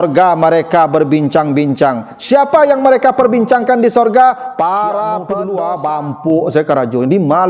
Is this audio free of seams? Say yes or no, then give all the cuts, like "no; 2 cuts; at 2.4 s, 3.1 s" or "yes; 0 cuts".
no; 1 cut; at 5.3 s